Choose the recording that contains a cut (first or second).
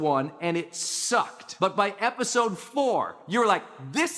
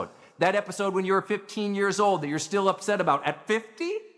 first